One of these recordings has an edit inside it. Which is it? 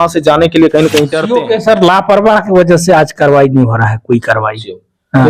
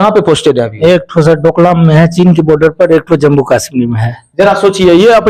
first; 1 cut; at 1.2 s

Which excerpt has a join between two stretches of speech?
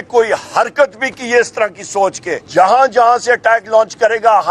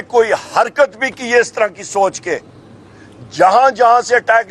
first; 1 cut; at 2.4 s

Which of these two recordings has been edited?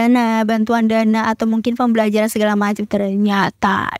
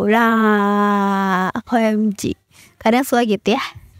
first; 1 cut; at 2.8 s

